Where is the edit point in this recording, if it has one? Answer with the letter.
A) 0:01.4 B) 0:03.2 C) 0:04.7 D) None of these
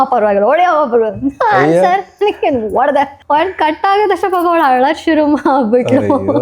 B